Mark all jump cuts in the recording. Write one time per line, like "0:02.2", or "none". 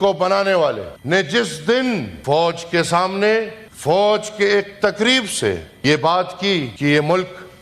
0:00.9
0:02.1
0:03.6
0:05.7
0:06.7